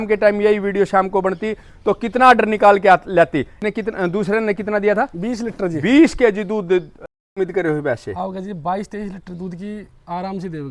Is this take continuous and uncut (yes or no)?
no